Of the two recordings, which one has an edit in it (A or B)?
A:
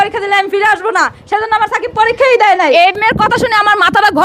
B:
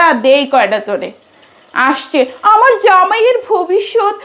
A